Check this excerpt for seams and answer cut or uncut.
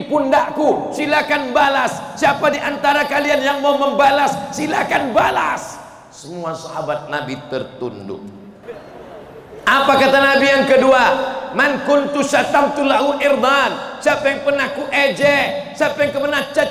cut